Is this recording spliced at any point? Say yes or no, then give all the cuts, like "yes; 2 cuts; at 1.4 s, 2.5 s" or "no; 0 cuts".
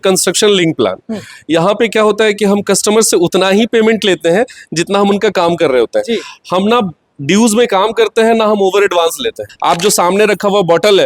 yes; 1 cut; at 9.5 s